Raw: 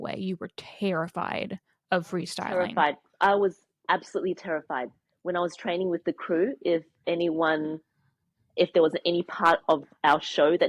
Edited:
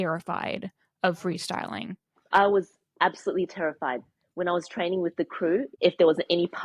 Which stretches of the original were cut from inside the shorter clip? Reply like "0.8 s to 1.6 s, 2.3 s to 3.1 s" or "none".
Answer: 6.6 s to 8.4 s